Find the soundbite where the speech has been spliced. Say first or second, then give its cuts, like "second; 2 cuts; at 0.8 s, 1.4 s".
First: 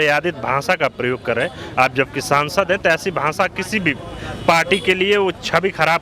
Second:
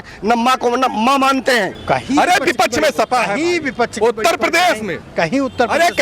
second; 1 cut; at 1.8 s